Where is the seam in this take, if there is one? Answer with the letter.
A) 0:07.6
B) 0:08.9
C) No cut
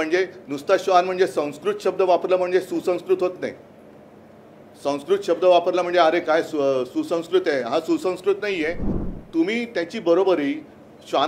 B